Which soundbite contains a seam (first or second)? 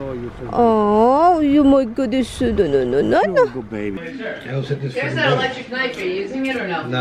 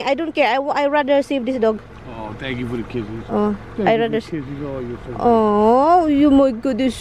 first